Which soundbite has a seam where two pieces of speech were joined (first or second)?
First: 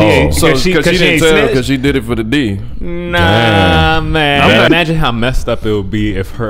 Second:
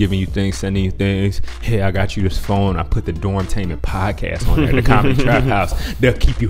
first